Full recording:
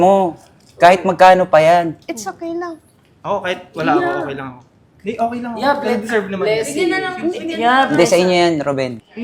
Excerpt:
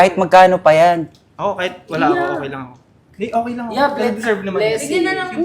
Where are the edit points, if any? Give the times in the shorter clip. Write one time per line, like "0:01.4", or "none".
0:01.2